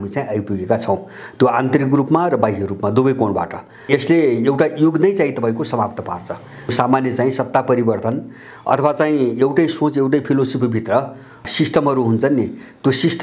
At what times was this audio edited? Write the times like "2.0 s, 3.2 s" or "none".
3.9 s, 6.7 s, 11.5 s